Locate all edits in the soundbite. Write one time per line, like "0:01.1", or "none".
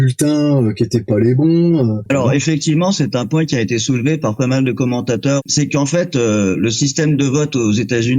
0:02.1
0:05.4